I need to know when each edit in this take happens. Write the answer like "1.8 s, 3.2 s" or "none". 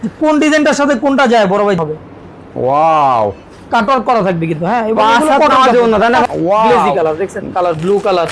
1.8 s, 6.2 s